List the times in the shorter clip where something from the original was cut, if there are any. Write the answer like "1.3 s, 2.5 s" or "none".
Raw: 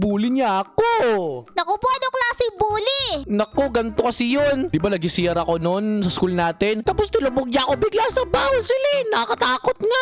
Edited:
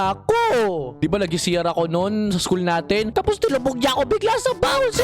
1.0 s